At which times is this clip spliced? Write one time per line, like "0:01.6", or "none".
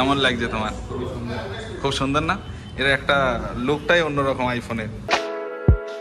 none